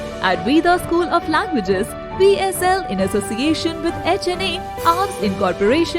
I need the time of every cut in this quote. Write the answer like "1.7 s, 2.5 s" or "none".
none

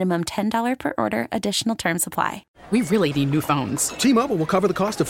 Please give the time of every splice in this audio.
2.5 s

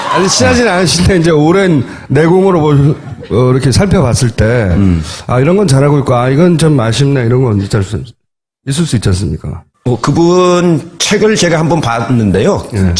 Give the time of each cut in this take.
7.7 s

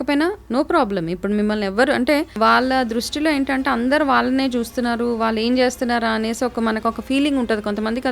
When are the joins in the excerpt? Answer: 2.3 s

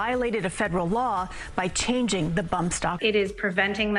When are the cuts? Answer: 3.0 s

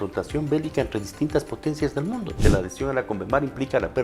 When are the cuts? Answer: 2.4 s

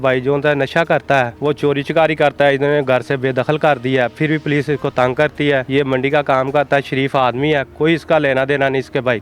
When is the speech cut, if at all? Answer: 1.3 s, 5.7 s

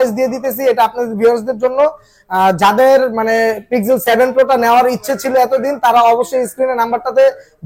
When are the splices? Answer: none

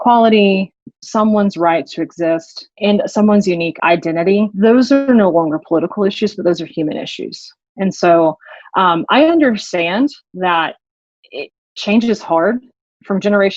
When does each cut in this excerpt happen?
0.9 s, 2.8 s, 4.0 s

